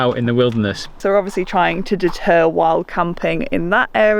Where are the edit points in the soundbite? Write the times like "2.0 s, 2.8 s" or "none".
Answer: 1.0 s